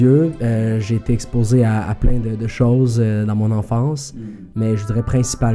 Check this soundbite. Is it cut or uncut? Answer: uncut